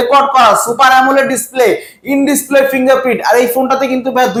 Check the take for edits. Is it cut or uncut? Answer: uncut